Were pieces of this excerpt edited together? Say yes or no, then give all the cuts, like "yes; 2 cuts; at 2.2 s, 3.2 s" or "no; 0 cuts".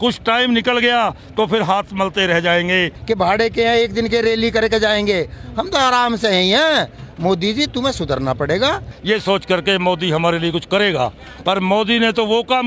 yes; 2 cuts; at 2.9 s, 8.9 s